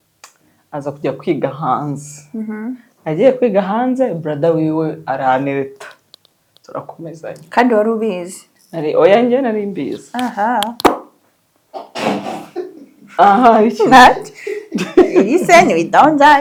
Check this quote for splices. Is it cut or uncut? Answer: uncut